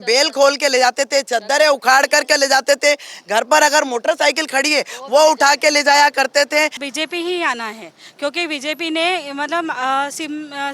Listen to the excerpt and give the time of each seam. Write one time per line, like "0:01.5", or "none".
0:06.8